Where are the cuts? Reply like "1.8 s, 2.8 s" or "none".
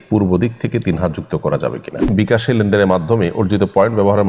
2.1 s